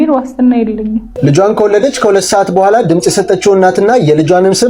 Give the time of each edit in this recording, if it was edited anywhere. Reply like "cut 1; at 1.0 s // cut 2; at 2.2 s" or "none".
cut 1; at 1.1 s